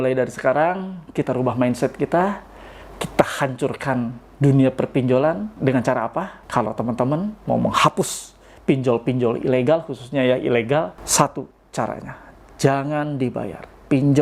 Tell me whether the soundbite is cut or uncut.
cut